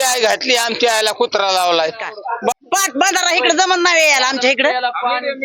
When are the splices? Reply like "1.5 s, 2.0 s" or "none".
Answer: 2.5 s